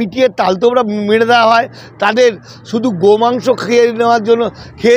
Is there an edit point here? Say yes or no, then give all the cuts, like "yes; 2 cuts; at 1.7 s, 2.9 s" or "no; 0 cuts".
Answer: no; 0 cuts